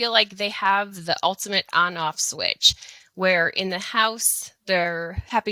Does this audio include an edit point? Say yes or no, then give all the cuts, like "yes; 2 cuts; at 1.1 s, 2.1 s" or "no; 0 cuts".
no; 0 cuts